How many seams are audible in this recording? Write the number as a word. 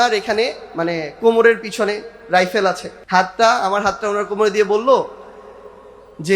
one